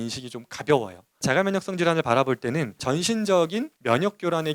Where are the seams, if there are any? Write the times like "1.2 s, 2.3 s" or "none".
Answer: 1.2 s, 2.8 s, 3.7 s